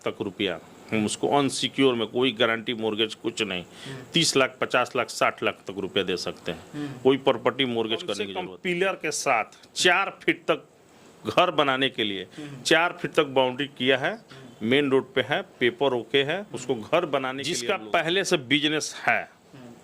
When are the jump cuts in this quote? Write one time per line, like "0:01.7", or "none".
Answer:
0:08.4
0:17.5